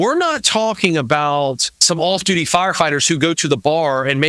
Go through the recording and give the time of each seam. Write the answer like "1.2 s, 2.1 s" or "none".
1.8 s